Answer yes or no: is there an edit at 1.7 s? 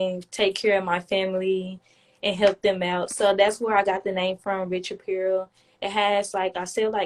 no